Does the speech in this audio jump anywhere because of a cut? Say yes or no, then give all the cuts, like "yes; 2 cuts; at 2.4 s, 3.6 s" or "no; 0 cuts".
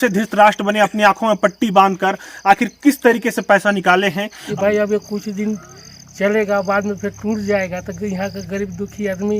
yes; 1 cut; at 4.4 s